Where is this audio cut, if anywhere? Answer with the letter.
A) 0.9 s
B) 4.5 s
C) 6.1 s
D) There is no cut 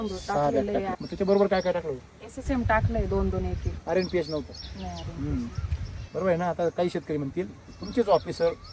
A